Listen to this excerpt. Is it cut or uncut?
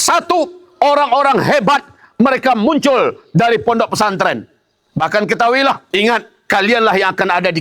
cut